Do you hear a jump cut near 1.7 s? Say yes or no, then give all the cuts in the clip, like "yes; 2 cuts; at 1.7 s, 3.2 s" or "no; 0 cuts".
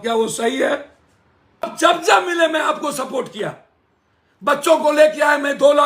yes; 1 cut; at 1.7 s